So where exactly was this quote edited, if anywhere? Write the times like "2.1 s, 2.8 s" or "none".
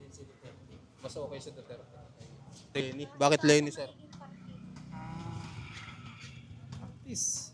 2.8 s